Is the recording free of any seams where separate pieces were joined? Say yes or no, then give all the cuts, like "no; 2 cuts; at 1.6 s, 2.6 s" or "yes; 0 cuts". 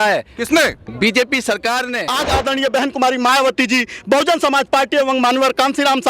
no; 1 cut; at 2.0 s